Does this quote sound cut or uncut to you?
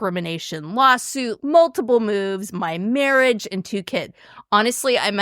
cut